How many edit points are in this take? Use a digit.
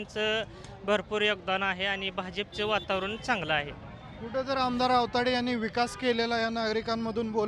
0